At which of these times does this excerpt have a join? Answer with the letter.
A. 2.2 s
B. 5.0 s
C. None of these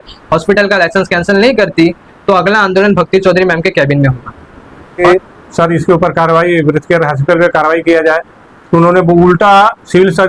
B